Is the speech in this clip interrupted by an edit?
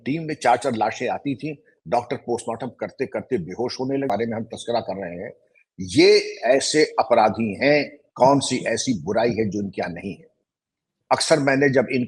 yes; 1 cut; at 4.1 s

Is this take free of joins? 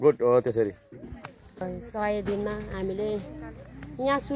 no; 1 cut; at 1.6 s

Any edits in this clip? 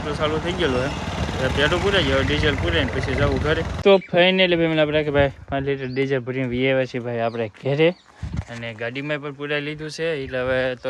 no; 0 cuts

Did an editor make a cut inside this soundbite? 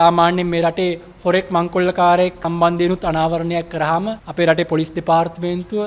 yes; 2 cuts; at 2.4 s, 4.2 s

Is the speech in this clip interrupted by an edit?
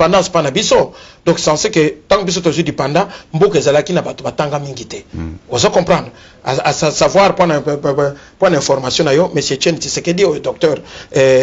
no; 0 cuts

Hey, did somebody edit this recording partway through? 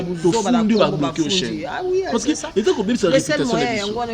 no; 0 cuts

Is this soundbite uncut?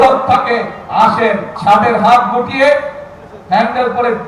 no; 1 cut; at 1.6 s

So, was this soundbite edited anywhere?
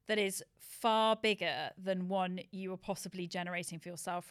no; 0 cuts

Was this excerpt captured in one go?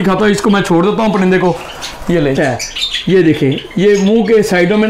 no; 1 cut; at 2.3 s

